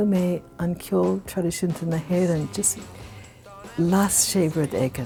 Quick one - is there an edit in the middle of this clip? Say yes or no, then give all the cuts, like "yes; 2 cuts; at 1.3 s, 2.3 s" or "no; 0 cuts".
no; 0 cuts